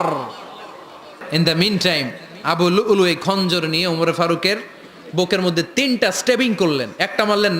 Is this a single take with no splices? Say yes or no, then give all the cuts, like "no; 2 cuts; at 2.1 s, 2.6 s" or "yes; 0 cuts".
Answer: no; 1 cut; at 1.2 s